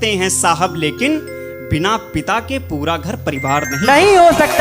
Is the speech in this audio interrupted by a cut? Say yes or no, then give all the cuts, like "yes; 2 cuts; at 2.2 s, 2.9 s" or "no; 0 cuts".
no; 0 cuts